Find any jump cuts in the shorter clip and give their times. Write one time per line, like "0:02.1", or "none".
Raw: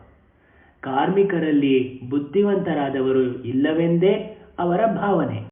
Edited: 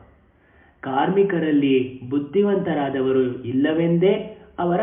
none